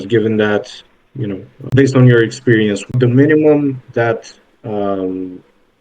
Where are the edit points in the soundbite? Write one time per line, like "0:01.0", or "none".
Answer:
0:01.6
0:02.9